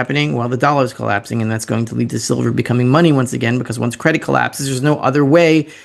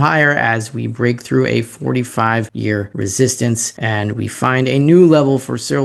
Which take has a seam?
second; 2 cuts; at 2.7 s, 3.7 s

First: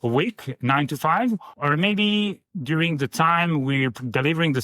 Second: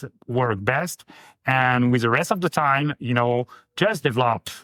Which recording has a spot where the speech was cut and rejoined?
first; 2 cuts; at 1.5 s, 2.5 s

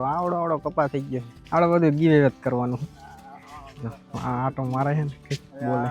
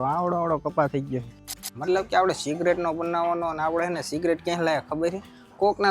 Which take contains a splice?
second; 1 cut; at 1.4 s

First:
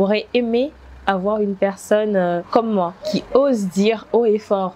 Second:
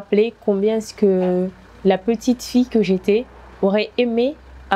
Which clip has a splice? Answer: first; 1 cut; at 2.4 s

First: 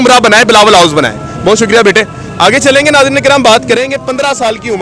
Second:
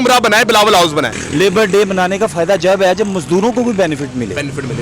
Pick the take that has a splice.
second; 1 cut; at 1.2 s

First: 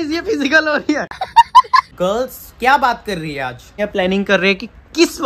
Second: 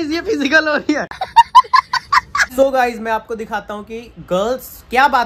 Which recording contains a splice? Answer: first; 2 cuts; at 1.9 s, 3.7 s

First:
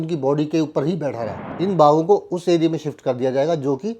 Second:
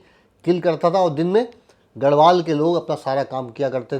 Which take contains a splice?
first; 1 cut; at 1.4 s

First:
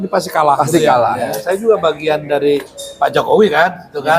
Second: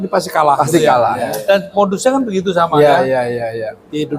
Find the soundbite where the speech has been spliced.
first; 1 cut; at 1.4 s

